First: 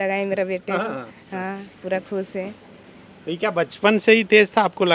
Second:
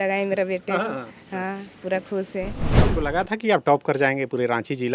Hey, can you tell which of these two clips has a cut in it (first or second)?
second